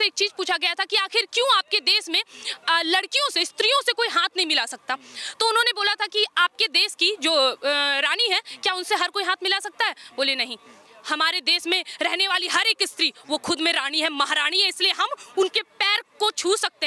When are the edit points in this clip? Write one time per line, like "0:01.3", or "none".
none